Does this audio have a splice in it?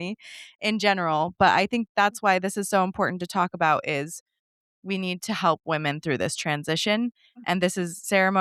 no; 0 cuts

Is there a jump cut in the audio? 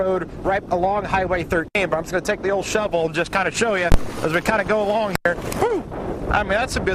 no; 0 cuts

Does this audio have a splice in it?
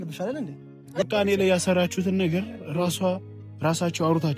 yes; 1 cut; at 1.0 s

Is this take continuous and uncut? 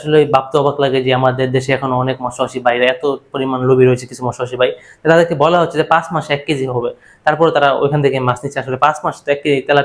yes; 0 cuts

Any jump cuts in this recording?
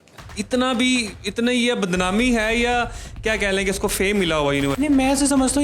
yes; 1 cut; at 4.7 s

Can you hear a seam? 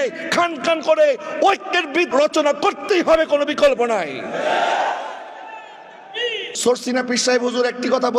yes; 2 cuts; at 2.1 s, 6.5 s

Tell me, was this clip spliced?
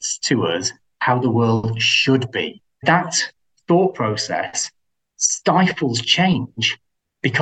yes; 1 cut; at 2.8 s

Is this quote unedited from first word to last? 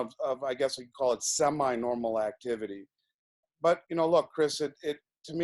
no; 1 cut; at 3.5 s

